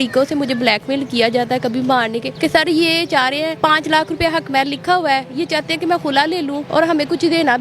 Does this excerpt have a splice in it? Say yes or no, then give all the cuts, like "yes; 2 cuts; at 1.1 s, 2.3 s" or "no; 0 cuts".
yes; 3 cuts; at 2.3 s, 3.5 s, 6.6 s